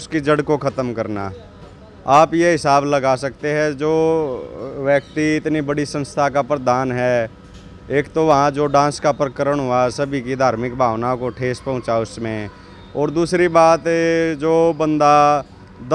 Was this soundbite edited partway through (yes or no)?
no